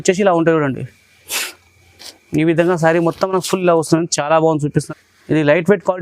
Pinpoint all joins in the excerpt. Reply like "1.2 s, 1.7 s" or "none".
4.9 s